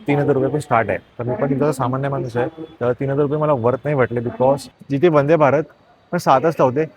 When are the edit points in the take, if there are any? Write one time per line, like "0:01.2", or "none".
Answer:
0:01.1
0:04.7